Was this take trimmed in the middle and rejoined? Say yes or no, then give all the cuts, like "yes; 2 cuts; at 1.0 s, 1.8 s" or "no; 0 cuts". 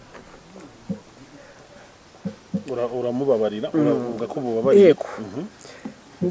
no; 0 cuts